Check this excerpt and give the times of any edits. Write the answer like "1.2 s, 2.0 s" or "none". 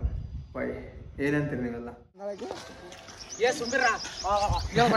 2.4 s